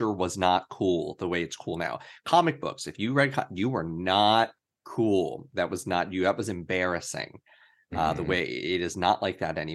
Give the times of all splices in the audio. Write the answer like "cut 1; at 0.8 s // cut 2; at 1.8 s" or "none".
none